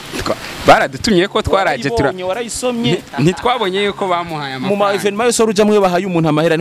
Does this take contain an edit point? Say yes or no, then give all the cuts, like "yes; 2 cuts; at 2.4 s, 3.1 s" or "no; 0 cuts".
no; 0 cuts